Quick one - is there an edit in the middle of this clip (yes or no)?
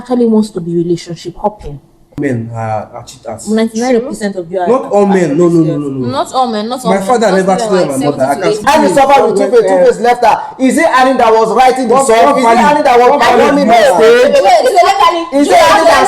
yes